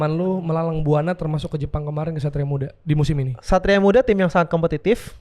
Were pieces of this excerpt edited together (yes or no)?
yes